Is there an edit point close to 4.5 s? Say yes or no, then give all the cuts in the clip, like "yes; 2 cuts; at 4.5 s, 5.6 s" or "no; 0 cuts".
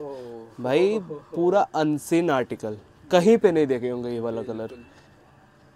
no; 0 cuts